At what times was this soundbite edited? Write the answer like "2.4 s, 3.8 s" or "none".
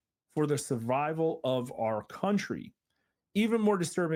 none